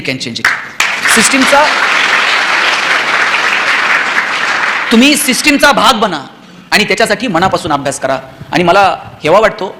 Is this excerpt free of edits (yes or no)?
yes